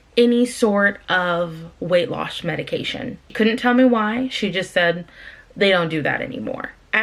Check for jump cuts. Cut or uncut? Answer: uncut